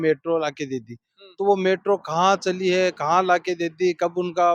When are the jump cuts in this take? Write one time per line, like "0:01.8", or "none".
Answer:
none